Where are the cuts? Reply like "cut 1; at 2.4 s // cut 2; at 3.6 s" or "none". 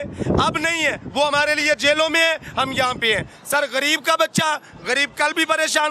none